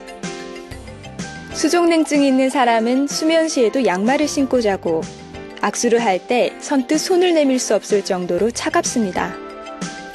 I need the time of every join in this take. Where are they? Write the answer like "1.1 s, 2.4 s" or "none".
4.6 s